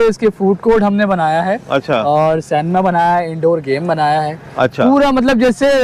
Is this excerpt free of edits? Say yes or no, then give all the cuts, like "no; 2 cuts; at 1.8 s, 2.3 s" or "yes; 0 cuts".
yes; 0 cuts